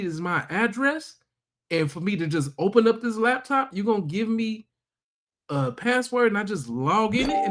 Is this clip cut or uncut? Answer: uncut